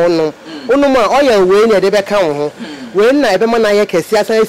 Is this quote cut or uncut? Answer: uncut